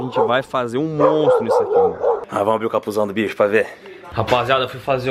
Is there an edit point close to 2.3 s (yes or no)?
yes